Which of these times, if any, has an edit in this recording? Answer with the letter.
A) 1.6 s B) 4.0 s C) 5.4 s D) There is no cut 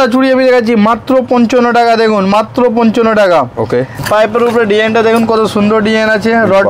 B